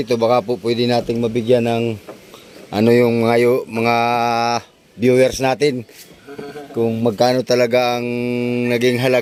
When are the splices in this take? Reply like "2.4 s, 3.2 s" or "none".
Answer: none